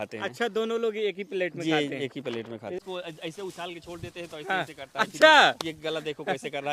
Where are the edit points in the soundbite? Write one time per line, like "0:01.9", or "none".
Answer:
0:02.8